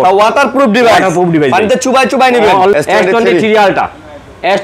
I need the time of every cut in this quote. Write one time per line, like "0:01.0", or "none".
0:02.7